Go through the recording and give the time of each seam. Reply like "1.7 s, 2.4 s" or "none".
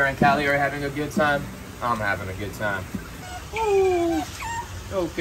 3.2 s